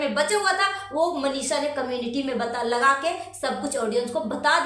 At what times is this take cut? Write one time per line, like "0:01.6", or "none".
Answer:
none